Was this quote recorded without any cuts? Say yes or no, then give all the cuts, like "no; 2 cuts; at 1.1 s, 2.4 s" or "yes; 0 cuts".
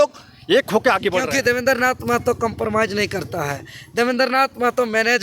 no; 1 cut; at 1.3 s